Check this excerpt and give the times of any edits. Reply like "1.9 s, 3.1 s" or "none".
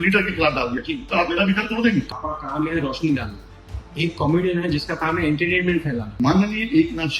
2.1 s, 6.1 s